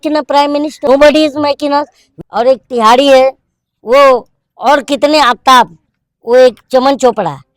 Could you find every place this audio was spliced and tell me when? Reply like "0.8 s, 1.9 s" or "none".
0.8 s, 2.0 s